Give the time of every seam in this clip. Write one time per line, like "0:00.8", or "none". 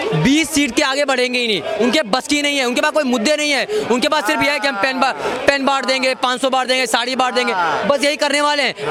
none